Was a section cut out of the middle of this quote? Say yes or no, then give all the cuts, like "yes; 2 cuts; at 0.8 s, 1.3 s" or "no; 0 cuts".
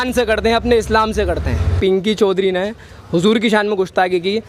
yes; 1 cut; at 1.7 s